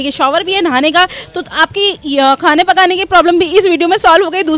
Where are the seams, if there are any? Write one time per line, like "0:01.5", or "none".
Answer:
none